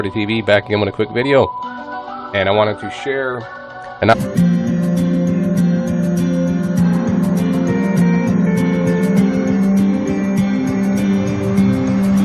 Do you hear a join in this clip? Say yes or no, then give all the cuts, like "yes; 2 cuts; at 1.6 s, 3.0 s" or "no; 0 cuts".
no; 0 cuts